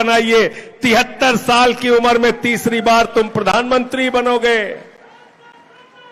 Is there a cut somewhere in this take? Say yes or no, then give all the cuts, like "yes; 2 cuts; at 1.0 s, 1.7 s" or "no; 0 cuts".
no; 0 cuts